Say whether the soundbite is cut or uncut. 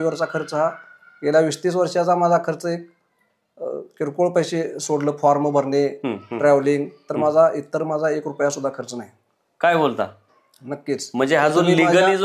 uncut